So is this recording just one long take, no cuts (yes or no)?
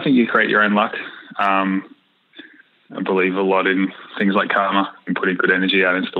no